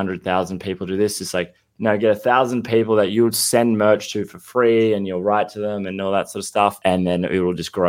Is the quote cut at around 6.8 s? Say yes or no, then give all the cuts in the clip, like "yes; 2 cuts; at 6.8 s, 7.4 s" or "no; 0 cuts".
yes; 1 cut; at 6.8 s